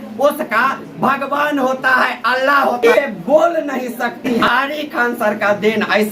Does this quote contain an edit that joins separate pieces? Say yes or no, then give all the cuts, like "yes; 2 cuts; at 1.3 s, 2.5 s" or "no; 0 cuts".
yes; 2 cuts; at 2.8 s, 4.4 s